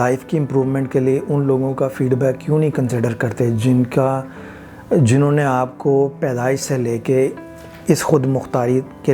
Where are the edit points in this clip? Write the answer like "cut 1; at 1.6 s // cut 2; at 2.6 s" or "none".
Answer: none